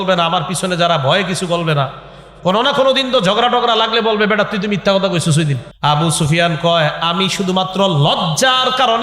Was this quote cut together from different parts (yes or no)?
yes